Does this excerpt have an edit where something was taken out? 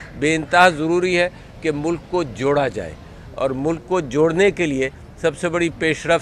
yes; 1 cut; at 1.1 s

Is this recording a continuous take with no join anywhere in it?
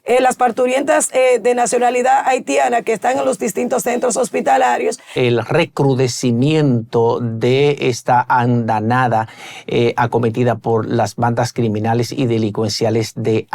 no; 1 cut; at 5.1 s

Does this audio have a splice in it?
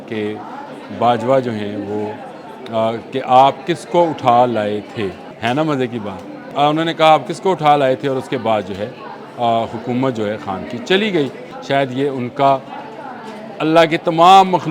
yes; 3 cuts; at 5.3 s, 6.4 s, 11.5 s

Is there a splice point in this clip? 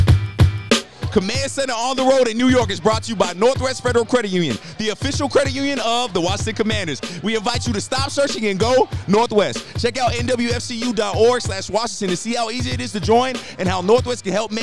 yes; 1 cut; at 1.0 s

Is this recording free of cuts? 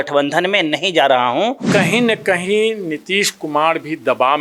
no; 1 cut; at 1.6 s

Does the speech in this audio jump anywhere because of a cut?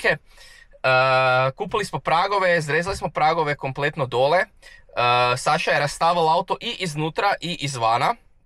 no; 0 cuts

